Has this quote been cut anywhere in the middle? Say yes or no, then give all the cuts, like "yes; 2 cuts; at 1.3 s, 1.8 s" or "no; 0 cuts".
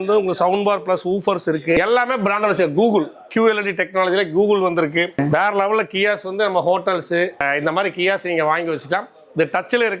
yes; 2 cuts; at 5.1 s, 7.4 s